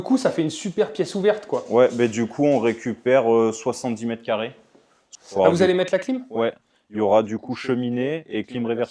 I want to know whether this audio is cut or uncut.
cut